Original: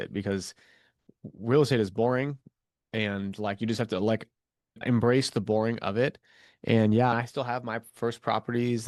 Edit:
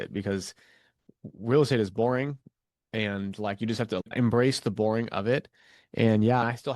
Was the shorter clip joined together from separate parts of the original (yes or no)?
yes